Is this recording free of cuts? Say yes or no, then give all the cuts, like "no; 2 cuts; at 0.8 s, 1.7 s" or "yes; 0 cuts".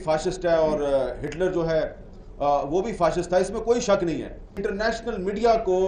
no; 1 cut; at 4.6 s